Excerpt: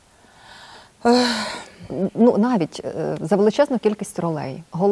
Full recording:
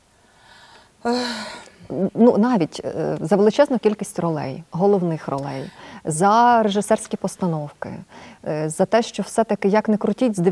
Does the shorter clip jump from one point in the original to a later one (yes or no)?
no